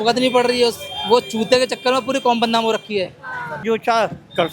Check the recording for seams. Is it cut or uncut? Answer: cut